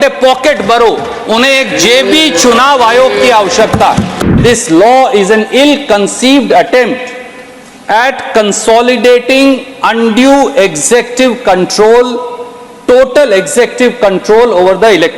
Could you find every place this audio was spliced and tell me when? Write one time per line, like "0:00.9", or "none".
0:04.2